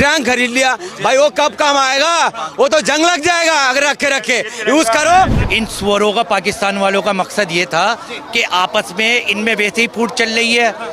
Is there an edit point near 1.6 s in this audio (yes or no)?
no